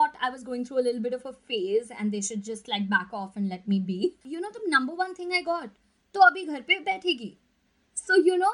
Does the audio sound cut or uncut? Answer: cut